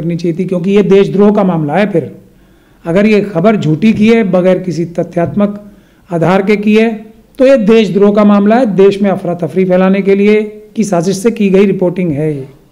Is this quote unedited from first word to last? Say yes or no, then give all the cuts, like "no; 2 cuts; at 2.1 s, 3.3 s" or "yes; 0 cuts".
yes; 0 cuts